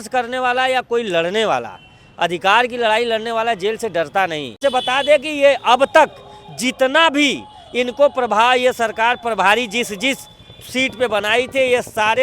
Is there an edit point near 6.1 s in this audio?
no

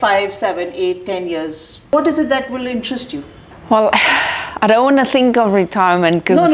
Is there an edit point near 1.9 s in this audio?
yes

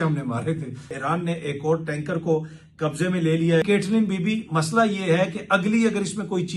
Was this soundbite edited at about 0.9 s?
yes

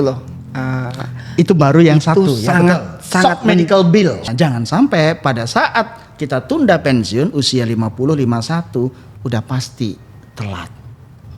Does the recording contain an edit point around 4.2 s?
yes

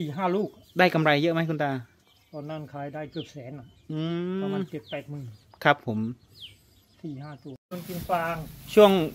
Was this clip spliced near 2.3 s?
no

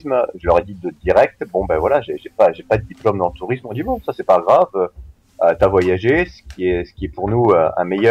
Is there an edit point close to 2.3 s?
no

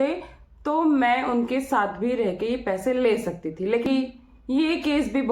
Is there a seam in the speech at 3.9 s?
yes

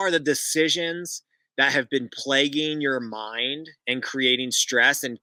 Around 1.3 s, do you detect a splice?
no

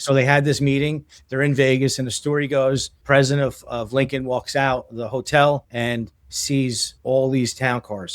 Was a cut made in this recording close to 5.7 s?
yes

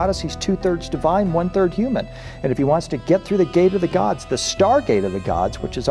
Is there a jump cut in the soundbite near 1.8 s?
no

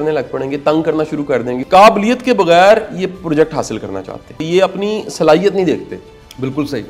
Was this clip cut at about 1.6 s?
yes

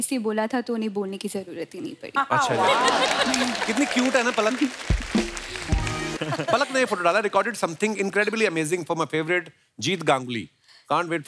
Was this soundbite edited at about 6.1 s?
yes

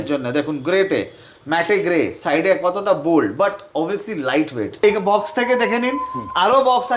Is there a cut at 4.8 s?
yes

